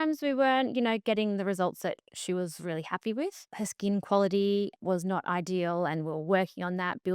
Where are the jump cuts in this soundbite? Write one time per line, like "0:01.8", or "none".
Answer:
0:03.5
0:04.8